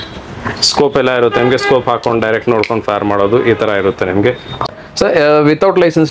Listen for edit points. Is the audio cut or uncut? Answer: cut